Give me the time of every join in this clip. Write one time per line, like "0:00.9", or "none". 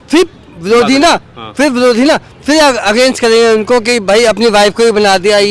none